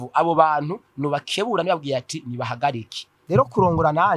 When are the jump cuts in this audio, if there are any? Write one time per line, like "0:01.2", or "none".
0:03.2